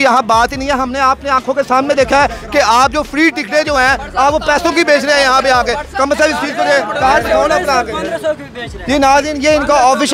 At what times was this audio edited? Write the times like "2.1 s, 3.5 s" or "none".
none